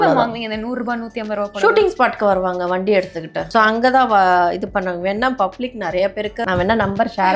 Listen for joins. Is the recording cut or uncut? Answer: cut